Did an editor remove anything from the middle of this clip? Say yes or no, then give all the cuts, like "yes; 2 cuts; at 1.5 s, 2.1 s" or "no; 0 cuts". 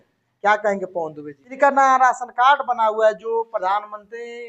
yes; 1 cut; at 1.5 s